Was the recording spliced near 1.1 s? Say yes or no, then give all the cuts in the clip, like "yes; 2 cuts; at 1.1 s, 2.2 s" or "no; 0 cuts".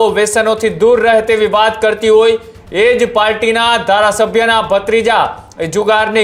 no; 0 cuts